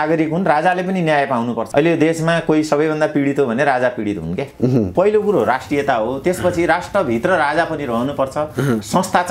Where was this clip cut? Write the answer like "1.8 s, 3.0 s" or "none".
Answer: 1.6 s, 4.9 s